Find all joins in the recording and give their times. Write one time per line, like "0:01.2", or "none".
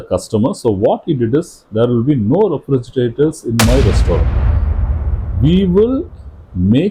none